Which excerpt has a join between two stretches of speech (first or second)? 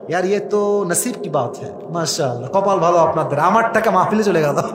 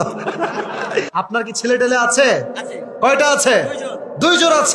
second